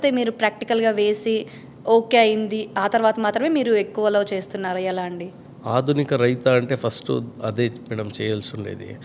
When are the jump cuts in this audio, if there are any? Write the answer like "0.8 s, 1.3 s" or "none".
none